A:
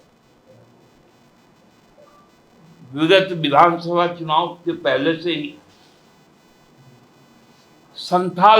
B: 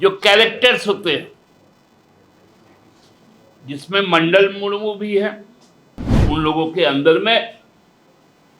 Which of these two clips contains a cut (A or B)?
B